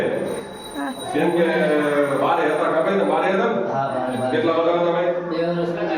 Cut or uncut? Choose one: uncut